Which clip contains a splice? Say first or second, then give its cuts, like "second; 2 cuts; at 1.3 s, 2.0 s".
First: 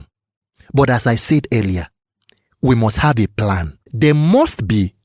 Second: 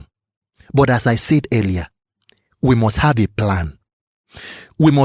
first; 1 cut; at 3.9 s